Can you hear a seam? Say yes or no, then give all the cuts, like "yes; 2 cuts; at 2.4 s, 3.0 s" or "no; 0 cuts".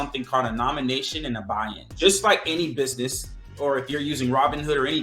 yes; 1 cut; at 1.9 s